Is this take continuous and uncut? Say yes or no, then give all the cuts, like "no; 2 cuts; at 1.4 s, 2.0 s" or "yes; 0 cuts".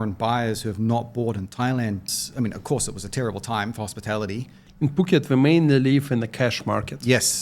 no; 2 cuts; at 2.1 s, 4.6 s